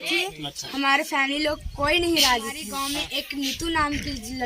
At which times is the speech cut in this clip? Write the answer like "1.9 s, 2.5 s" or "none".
2.7 s

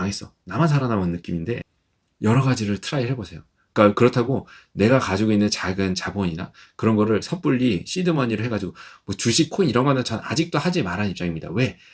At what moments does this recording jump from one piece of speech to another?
1.7 s

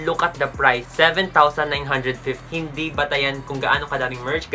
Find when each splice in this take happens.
0.9 s, 2.4 s

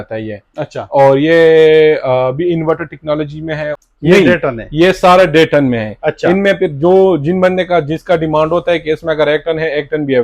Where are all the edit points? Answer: 3.8 s

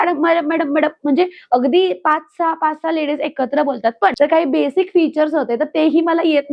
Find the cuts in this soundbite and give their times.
4.1 s

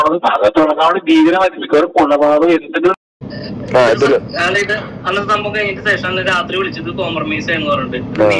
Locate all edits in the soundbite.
2.9 s

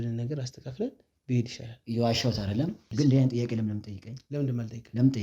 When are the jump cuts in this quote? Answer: 2.8 s

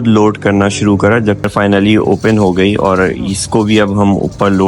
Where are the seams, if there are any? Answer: 1.5 s

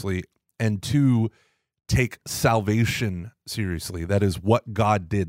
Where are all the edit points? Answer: none

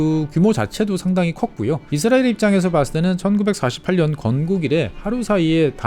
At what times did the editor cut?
1.9 s, 5.0 s

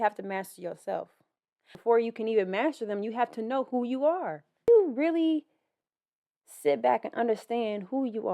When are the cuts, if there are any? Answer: 1.8 s, 4.7 s

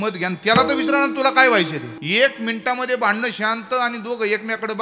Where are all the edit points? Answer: 1.9 s

